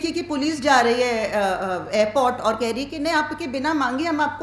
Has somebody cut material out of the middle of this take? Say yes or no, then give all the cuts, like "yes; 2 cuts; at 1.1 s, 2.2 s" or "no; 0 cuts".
no; 0 cuts